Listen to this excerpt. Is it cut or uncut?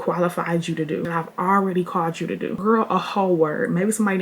uncut